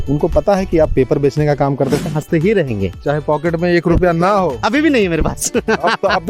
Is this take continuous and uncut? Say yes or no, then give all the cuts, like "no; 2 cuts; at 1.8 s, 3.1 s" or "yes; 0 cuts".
no; 1 cut; at 2.1 s